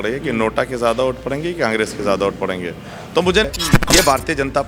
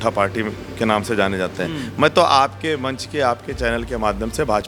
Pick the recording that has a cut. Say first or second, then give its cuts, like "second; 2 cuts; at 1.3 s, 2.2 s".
first; 1 cut; at 3.4 s